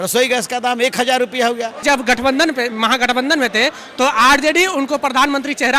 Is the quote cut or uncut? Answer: cut